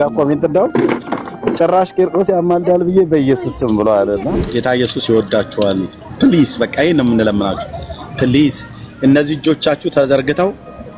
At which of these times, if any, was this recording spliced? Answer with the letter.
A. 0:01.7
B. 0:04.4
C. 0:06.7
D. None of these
B